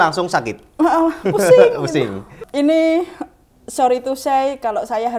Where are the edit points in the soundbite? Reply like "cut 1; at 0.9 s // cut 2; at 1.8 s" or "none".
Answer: cut 1; at 2.4 s